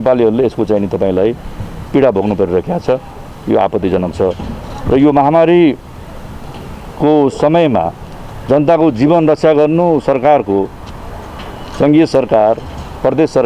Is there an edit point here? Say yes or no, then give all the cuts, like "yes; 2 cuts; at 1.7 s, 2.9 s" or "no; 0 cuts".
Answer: no; 0 cuts